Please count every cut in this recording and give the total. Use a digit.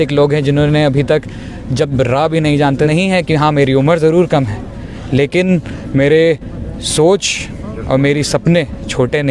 1